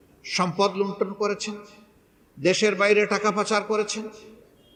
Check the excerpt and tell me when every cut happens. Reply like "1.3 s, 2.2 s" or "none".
none